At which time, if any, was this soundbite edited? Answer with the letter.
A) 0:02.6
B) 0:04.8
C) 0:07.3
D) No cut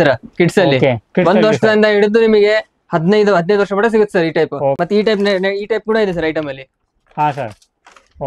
B